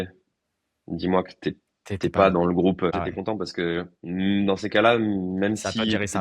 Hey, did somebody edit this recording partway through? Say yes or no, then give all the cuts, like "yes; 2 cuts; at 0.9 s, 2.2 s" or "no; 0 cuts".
yes; 1 cut; at 2.9 s